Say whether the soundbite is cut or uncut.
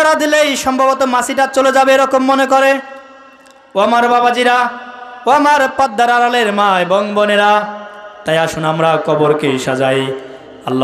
uncut